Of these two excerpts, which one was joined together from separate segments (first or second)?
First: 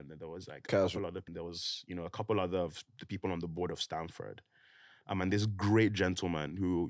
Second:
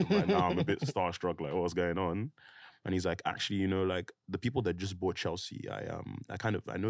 first